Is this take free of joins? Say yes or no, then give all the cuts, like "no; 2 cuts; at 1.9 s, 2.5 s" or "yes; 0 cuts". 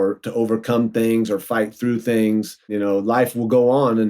no; 1 cut; at 2.7 s